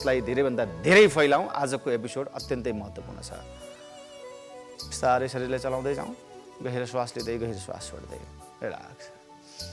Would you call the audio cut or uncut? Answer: uncut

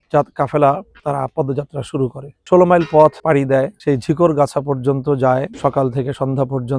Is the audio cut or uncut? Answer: cut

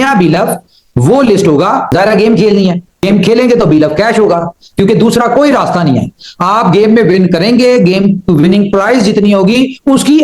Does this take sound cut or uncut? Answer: cut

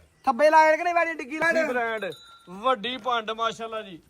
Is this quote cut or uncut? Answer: cut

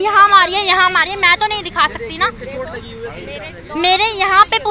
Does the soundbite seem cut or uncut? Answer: uncut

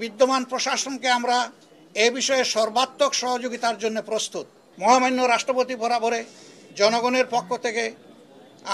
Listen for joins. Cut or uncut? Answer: cut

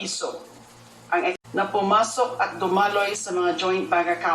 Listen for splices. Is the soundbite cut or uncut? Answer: cut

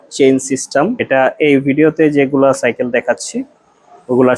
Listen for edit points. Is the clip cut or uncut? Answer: cut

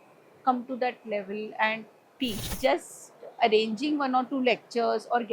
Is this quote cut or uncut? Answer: cut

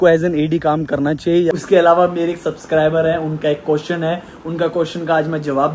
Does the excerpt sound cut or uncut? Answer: cut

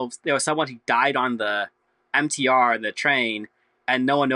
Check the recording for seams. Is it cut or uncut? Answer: uncut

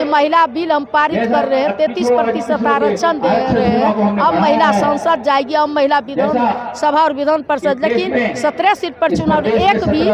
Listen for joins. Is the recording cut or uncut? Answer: uncut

